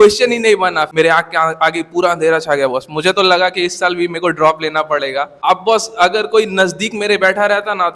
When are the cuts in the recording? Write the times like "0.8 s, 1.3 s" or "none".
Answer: 0.9 s, 5.3 s